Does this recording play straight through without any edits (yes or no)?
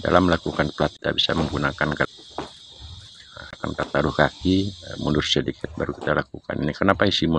no